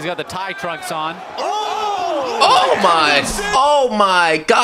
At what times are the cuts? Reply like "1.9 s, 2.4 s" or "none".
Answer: none